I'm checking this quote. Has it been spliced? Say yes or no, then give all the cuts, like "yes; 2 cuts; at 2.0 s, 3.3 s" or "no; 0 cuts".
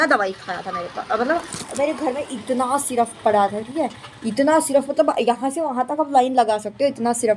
no; 0 cuts